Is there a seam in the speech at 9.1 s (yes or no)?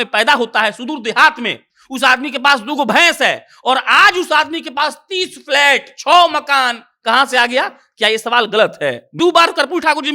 yes